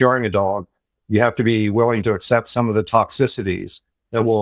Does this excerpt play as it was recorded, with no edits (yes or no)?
yes